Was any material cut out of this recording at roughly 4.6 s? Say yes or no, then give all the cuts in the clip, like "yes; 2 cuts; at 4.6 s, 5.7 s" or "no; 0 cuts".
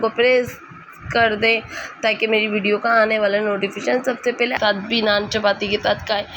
yes; 1 cut; at 4.6 s